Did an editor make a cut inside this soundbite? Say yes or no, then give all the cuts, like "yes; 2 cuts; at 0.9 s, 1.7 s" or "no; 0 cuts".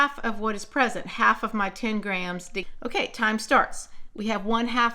yes; 1 cut; at 2.7 s